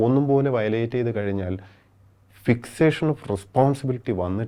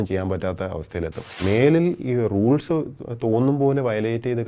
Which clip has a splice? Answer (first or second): second